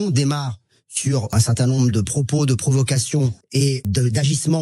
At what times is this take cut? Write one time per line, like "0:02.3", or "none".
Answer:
0:01.3
0:03.8